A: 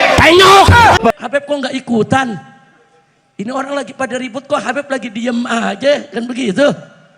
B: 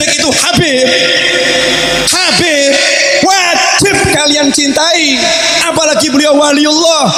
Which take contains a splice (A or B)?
A